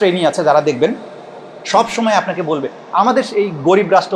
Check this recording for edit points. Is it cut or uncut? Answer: uncut